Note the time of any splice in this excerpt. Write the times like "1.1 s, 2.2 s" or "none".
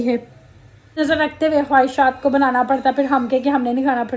1.0 s